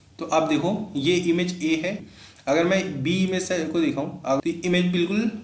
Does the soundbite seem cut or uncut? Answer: cut